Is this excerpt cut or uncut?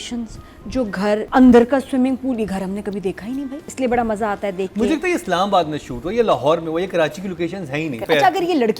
cut